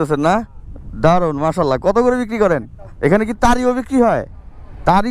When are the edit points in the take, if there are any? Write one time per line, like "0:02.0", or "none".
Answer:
0:02.9